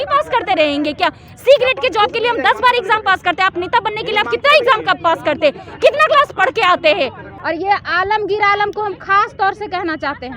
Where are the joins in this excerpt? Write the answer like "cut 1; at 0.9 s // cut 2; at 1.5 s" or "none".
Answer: cut 1; at 7.4 s